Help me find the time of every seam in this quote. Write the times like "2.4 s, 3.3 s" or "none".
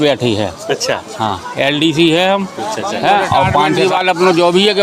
3.7 s